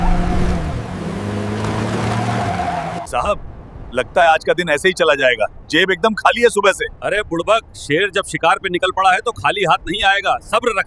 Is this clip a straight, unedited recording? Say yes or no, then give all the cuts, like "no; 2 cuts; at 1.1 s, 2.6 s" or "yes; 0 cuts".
no; 1 cut; at 3.1 s